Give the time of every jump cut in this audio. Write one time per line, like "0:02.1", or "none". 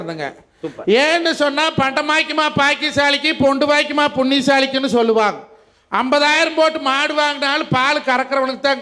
none